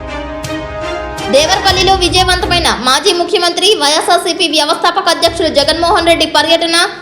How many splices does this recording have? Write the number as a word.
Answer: one